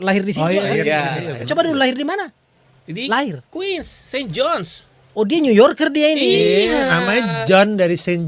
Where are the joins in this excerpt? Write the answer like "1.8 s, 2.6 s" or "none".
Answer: none